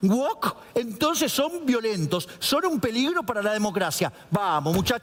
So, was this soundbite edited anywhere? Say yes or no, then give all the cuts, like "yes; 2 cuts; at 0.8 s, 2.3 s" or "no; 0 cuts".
no; 0 cuts